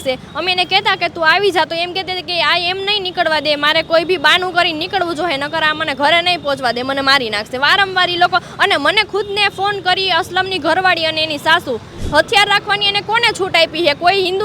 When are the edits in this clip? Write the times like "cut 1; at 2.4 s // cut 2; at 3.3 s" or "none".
cut 1; at 12.0 s

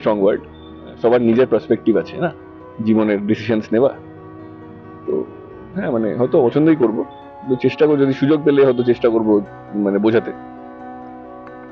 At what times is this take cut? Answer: none

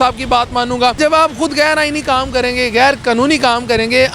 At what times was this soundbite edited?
cut 1; at 1.0 s

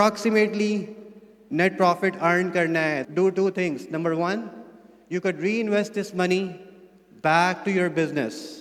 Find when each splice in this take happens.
cut 1; at 3.0 s

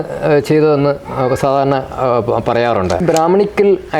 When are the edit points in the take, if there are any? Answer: cut 1; at 3.0 s

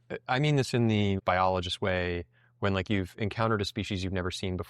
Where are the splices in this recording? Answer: cut 1; at 1.2 s

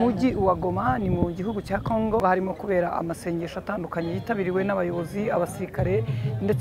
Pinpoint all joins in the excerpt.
cut 1; at 2.2 s

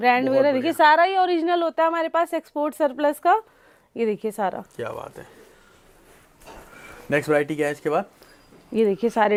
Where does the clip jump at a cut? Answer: none

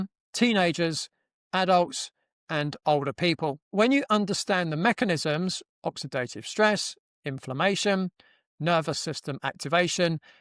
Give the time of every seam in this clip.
cut 1; at 3.7 s

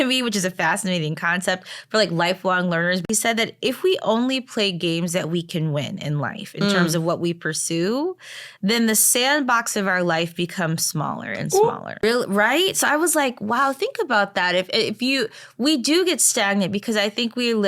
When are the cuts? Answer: cut 1; at 3.0 s // cut 2; at 12.0 s

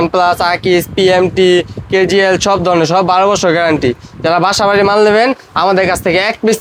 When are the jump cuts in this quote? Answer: none

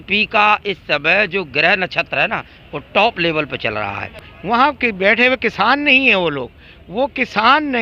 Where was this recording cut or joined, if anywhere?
cut 1; at 4.3 s

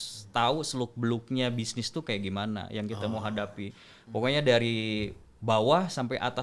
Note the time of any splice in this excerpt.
none

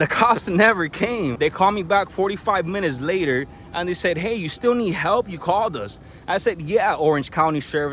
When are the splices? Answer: cut 1; at 1.3 s

